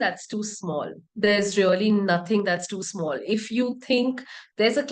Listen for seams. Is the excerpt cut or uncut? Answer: uncut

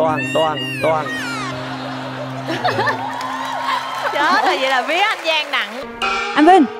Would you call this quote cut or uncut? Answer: cut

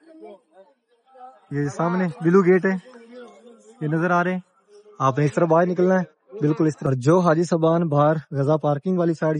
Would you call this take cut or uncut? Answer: cut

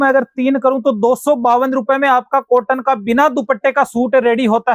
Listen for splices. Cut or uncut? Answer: uncut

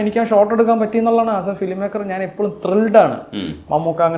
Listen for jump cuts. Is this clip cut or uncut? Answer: uncut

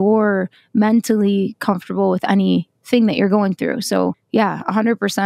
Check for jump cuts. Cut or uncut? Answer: cut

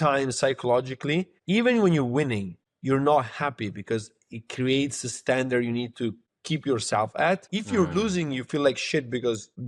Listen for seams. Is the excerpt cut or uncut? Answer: uncut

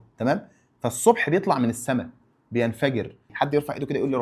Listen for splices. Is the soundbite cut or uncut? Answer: cut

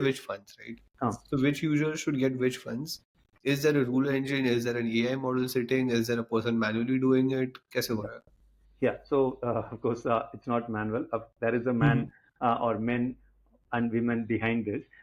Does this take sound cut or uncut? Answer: uncut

